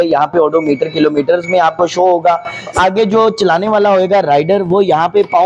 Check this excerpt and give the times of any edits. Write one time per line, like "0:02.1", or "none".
0:02.7